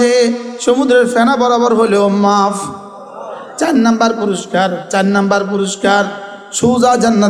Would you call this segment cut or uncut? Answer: uncut